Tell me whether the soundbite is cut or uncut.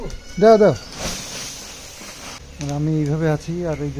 cut